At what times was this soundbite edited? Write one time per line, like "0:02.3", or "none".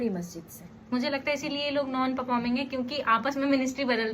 0:00.9